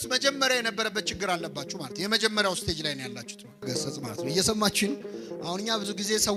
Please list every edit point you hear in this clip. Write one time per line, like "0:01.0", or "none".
0:03.6